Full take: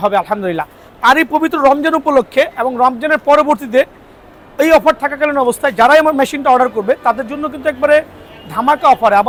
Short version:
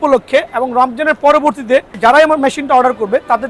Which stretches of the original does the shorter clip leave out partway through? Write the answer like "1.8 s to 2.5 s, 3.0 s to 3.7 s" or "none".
4.0 s to 5.7 s